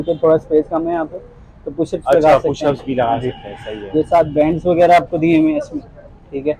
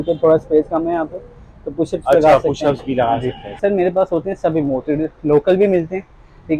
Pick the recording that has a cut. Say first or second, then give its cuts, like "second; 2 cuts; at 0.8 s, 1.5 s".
second; 1 cut; at 3.6 s